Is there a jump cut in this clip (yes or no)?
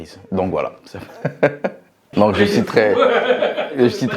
yes